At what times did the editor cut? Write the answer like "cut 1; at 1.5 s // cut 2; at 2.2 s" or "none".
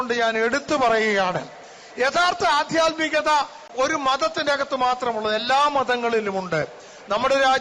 cut 1; at 3.6 s